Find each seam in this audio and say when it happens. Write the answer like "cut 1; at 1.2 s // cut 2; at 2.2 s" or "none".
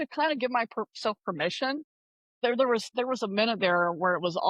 cut 1; at 2.4 s